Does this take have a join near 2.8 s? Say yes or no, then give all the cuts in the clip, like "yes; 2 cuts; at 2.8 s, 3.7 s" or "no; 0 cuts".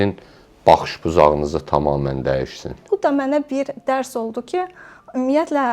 yes; 1 cut; at 2.8 s